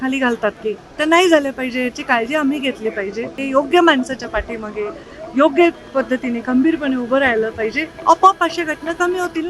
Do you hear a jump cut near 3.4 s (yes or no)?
yes